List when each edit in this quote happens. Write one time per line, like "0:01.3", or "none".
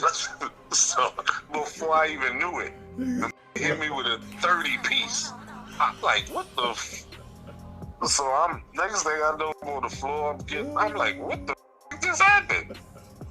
0:07.9
0:09.6
0:11.8